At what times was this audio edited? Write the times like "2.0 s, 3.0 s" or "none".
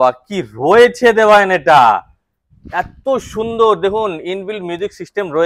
none